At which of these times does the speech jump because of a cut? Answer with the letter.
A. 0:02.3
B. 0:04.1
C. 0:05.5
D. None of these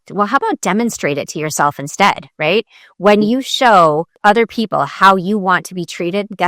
B